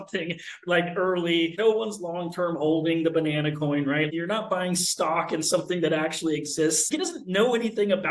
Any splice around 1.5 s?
yes; 3 cuts; at 1.5 s, 4.1 s, 6.8 s

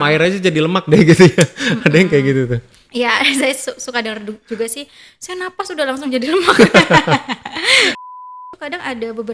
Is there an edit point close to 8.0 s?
yes; 1 cut; at 8.0 s

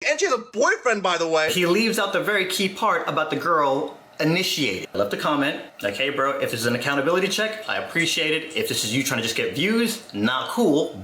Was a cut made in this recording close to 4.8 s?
yes; 2 cuts; at 1.5 s, 4.8 s

